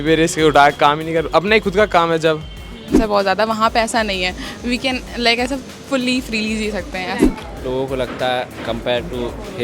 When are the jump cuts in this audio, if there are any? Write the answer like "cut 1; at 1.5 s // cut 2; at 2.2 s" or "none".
cut 1; at 2.9 s // cut 2; at 7.3 s